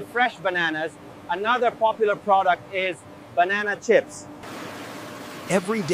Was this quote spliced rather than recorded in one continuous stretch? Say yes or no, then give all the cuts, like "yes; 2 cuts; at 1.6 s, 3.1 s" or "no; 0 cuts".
yes; 1 cut; at 4.4 s